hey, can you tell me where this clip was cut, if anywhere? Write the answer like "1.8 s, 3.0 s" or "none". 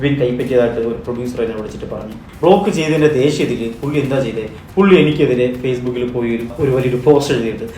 2.2 s, 6.5 s